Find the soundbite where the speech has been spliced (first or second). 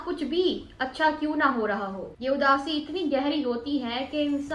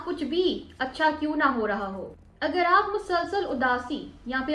second